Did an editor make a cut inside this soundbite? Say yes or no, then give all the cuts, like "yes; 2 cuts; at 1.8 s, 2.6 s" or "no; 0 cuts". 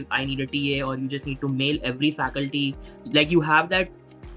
no; 0 cuts